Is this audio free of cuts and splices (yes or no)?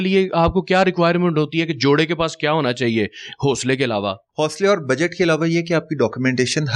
no